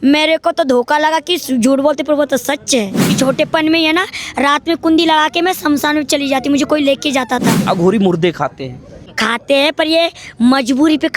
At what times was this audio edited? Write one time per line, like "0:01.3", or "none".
0:03.1
0:07.6
0:09.1